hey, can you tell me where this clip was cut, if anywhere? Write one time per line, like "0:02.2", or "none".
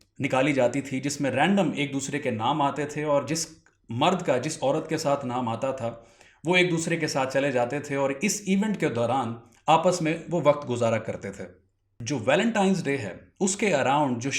0:12.1